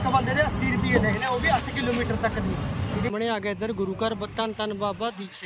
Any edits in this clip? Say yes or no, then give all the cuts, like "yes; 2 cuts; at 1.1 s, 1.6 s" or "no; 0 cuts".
yes; 1 cut; at 3.1 s